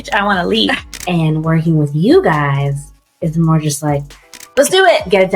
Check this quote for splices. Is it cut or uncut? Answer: cut